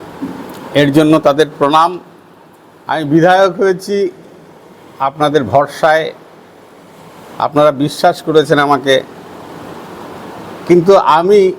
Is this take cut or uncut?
cut